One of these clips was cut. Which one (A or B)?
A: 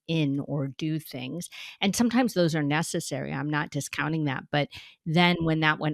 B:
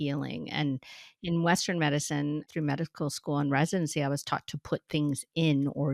B